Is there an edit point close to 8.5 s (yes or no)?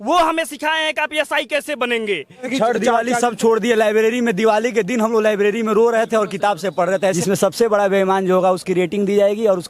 no